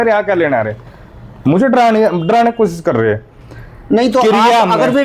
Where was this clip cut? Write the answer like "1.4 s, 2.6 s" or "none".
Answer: none